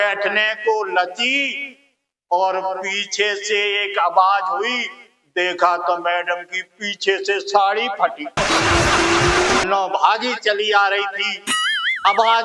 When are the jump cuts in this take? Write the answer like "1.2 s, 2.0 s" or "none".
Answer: 9.6 s

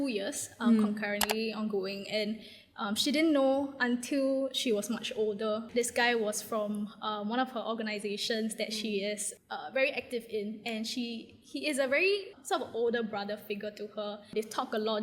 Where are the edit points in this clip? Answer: 5.7 s, 12.3 s, 14.3 s

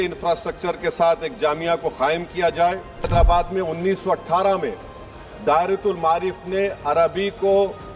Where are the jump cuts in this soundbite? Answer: 3.1 s

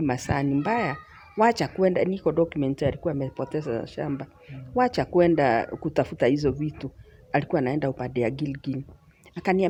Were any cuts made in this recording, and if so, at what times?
none

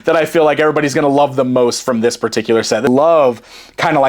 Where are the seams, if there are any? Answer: 2.9 s

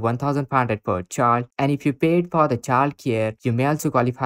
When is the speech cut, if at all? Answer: none

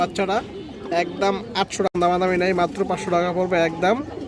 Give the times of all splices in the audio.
1.9 s

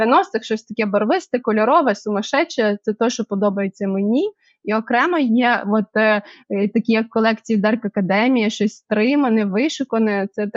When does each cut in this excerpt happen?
none

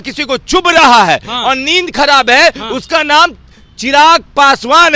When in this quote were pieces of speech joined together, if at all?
none

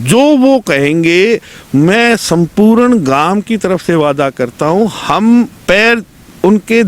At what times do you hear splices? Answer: none

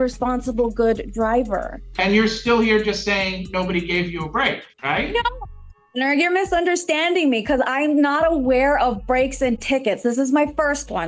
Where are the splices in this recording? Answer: 1.8 s, 4.7 s

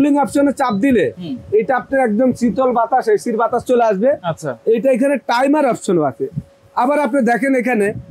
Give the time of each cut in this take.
none

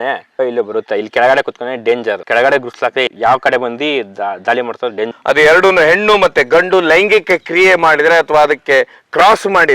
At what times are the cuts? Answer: 3.1 s, 5.1 s

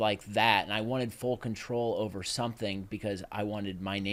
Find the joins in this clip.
none

